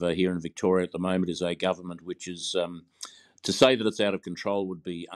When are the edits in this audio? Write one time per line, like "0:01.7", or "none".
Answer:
none